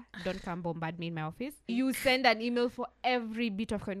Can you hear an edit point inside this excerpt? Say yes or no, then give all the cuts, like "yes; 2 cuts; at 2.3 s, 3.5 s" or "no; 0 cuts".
yes; 1 cut; at 1.6 s